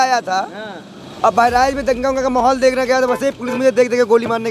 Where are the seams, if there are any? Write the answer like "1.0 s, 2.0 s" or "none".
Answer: none